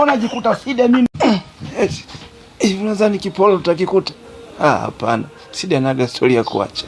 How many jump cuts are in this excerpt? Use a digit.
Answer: 1